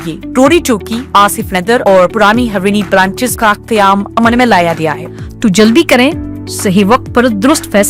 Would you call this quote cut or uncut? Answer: cut